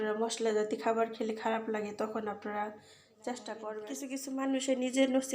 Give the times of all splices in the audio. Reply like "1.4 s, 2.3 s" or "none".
4.1 s